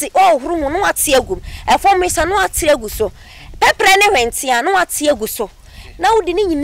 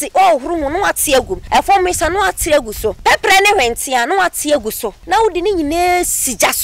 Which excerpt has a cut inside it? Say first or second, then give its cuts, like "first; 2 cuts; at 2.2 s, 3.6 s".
second; 3 cuts; at 1.4 s, 3.0 s, 4.9 s